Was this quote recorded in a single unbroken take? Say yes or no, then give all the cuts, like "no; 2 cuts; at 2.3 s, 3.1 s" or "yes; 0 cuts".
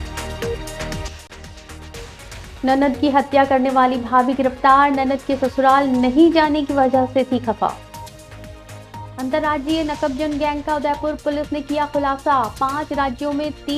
no; 1 cut; at 0.9 s